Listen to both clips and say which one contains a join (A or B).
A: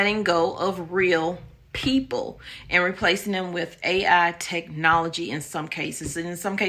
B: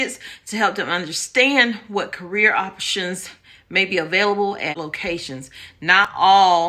B